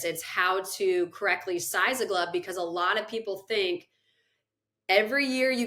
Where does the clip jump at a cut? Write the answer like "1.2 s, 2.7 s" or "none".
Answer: none